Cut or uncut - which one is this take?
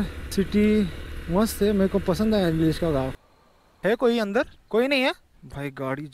cut